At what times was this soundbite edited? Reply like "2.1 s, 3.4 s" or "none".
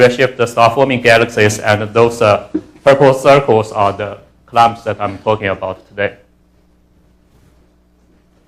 1.3 s